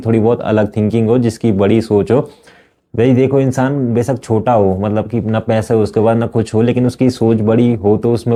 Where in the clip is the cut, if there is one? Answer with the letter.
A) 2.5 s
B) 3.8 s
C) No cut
C